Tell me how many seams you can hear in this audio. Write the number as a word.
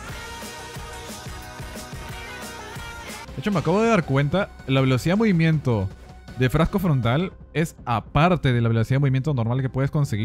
one